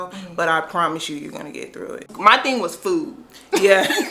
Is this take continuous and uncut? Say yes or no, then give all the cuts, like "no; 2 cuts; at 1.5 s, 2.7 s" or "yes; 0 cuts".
no; 1 cut; at 2.1 s